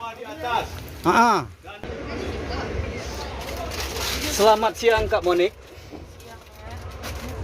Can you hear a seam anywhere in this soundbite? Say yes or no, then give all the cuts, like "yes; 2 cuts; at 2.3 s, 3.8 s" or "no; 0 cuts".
yes; 1 cut; at 1.7 s